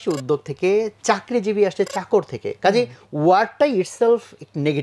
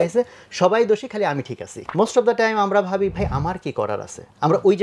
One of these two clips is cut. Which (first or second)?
second